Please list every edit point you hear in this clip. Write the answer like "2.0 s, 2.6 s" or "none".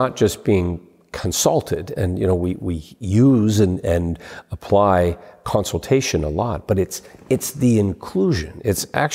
none